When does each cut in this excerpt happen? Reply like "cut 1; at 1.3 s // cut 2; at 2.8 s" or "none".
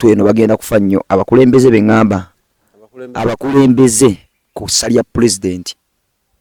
none